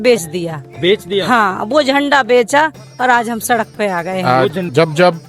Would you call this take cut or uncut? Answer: cut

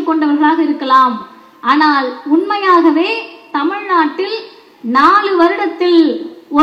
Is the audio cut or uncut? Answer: uncut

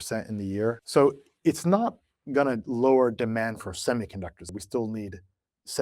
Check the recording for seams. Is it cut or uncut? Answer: cut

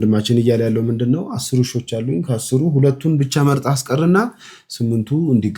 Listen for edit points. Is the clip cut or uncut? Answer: uncut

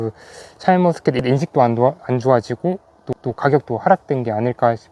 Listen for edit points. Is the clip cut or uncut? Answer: uncut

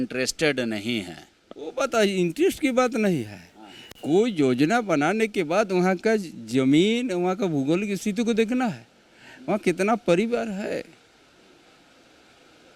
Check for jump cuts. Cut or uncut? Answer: uncut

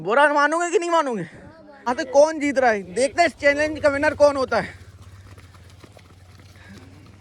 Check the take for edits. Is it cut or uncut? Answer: cut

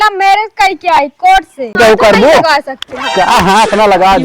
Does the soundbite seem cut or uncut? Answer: cut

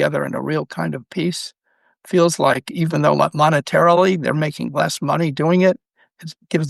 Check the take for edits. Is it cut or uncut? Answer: uncut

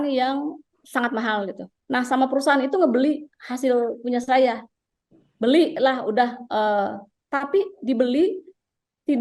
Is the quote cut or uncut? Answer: cut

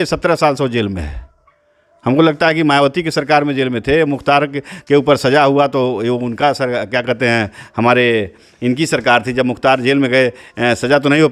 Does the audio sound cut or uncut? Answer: uncut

